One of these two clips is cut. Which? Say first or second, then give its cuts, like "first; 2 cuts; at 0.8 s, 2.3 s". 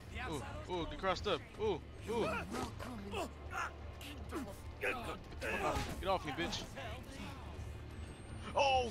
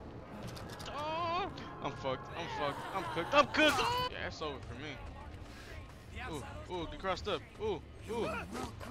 second; 1 cut; at 4.1 s